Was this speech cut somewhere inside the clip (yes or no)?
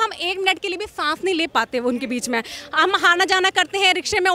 no